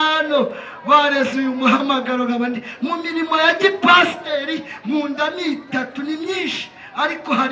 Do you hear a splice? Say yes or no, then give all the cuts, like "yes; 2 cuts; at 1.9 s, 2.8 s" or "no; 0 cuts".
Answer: no; 0 cuts